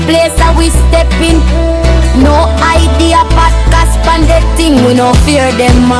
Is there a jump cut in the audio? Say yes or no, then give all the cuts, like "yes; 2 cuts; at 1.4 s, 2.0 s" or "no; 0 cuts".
no; 0 cuts